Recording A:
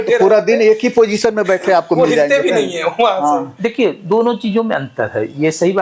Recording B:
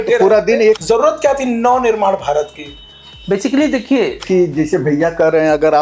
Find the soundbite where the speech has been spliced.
B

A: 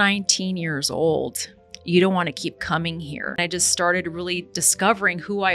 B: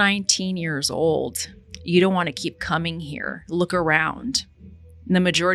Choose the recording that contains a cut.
A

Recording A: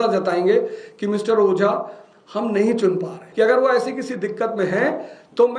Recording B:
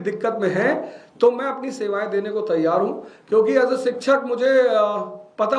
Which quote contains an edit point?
A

